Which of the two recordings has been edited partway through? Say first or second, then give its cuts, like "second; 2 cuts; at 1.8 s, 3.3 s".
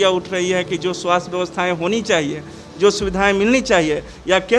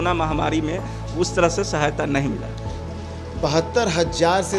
second; 1 cut; at 2.9 s